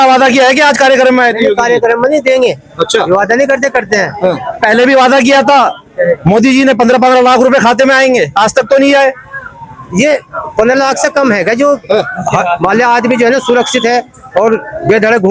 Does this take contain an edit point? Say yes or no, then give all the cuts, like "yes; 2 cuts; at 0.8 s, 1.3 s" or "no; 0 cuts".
no; 0 cuts